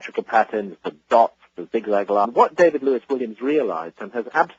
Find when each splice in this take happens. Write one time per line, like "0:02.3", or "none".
none